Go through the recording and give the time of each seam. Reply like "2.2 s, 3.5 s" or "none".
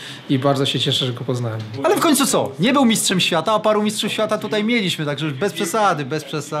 1.7 s